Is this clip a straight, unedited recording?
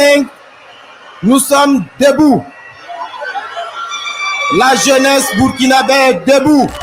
yes; 0 cuts

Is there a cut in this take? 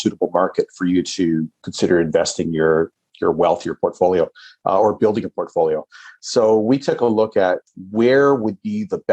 yes; 2 cuts; at 1.7 s, 7.7 s

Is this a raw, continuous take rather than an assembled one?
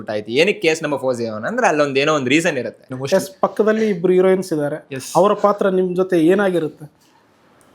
no; 1 cut; at 2.9 s

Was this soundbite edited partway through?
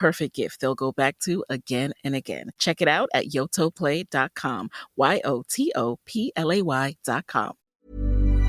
yes; 1 cut; at 7.6 s

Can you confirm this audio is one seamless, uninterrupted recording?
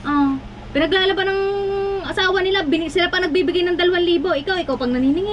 yes; 0 cuts

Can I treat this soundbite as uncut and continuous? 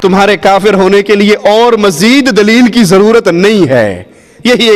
yes; 0 cuts

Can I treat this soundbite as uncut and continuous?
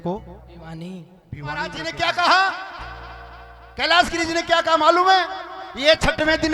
no; 1 cut; at 1.5 s

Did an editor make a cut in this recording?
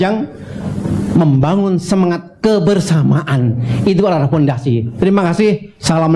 no; 0 cuts

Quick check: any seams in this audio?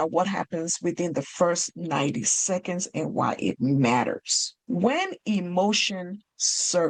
no; 0 cuts

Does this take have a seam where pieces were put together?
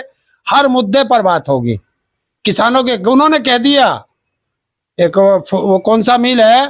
no; 0 cuts

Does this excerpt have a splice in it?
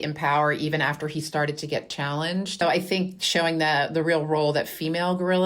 yes; 1 cut; at 2.6 s

